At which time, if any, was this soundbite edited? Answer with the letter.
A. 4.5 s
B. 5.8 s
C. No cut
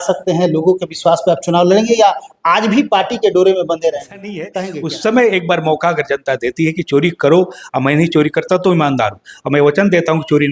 A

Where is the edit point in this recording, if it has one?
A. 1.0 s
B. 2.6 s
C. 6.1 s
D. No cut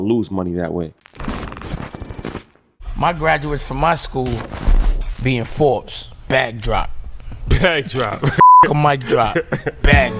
A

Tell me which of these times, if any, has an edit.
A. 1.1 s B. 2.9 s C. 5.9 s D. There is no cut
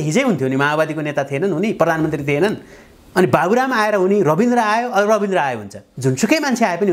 C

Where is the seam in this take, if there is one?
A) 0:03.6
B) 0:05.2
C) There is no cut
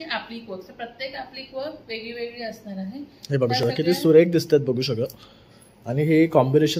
C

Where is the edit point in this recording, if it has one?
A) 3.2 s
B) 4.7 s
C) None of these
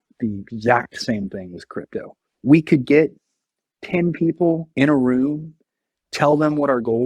B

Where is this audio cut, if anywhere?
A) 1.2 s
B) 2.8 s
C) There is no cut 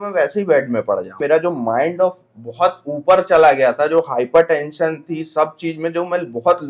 A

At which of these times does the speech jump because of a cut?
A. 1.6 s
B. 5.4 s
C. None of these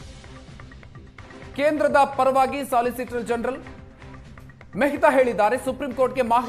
A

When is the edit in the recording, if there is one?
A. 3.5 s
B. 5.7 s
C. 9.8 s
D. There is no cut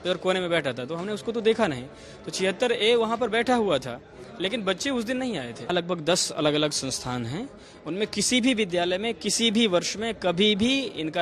B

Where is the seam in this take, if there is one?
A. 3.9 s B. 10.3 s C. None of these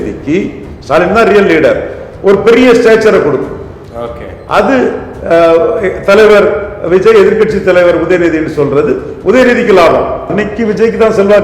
B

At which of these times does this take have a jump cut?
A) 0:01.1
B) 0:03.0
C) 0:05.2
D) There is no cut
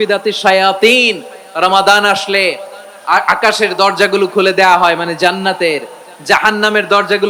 D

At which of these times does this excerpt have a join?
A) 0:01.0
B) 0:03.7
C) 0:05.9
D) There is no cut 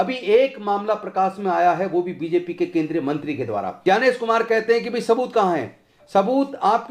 B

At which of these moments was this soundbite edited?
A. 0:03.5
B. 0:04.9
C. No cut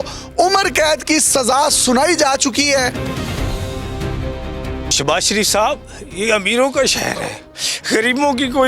B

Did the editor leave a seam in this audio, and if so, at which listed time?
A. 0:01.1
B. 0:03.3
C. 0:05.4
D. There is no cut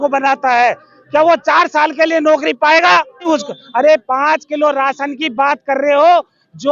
B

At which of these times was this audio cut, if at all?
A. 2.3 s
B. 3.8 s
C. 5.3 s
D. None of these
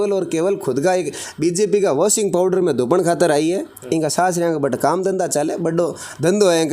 D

